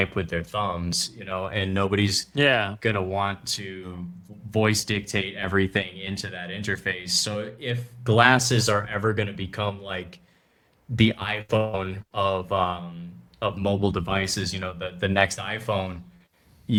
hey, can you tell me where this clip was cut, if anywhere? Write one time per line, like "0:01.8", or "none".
none